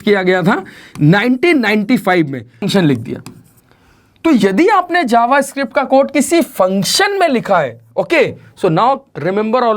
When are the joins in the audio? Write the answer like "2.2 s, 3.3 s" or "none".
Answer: 2.6 s